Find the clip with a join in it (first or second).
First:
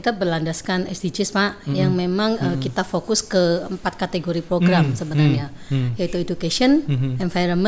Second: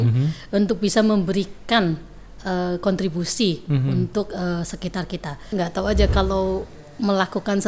second